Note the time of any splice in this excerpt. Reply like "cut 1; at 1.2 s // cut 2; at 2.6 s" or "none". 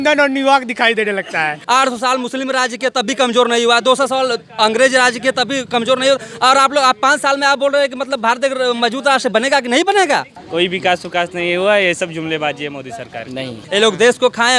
cut 1; at 1.6 s // cut 2; at 10.4 s // cut 3; at 13.6 s